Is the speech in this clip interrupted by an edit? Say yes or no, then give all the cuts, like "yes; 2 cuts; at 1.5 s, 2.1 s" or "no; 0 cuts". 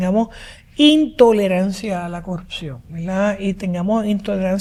no; 0 cuts